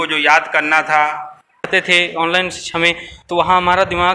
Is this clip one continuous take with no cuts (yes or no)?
no